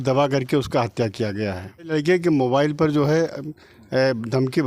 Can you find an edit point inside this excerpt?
yes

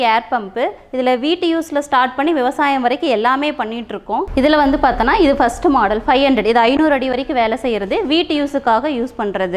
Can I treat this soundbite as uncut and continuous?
no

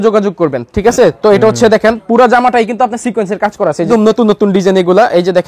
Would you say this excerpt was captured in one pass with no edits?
no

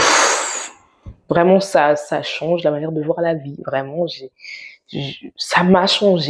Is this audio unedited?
yes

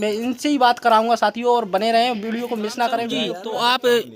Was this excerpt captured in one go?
no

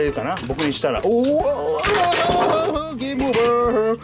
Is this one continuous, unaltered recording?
yes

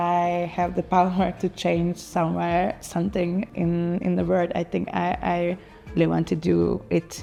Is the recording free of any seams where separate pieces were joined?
yes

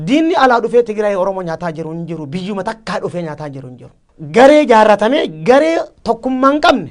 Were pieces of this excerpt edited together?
no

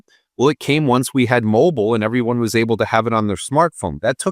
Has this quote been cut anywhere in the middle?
no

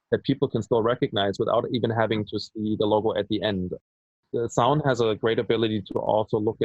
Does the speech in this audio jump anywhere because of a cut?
no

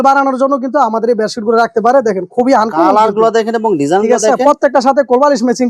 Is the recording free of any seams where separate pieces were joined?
yes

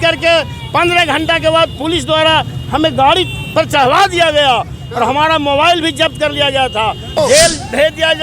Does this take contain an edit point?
yes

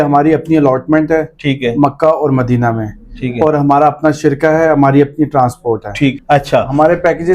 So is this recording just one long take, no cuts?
no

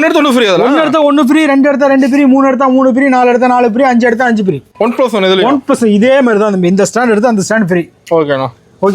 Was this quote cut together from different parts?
yes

